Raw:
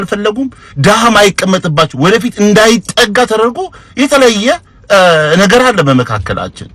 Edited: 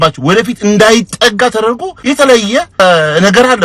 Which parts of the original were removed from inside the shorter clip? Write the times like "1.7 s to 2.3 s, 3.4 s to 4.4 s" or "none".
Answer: 3.7 s to 3.8 s, 4.7 s to 5.0 s